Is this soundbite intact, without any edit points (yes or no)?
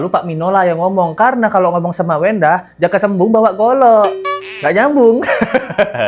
yes